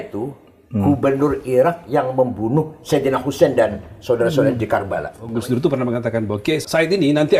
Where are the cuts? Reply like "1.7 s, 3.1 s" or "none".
5.2 s, 6.7 s